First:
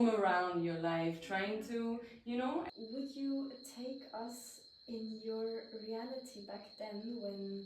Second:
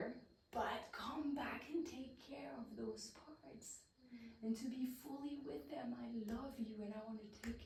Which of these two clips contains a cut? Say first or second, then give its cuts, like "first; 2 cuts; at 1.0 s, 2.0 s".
first; 1 cut; at 2.7 s